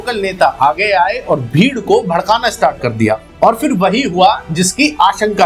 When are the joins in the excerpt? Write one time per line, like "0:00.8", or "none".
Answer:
none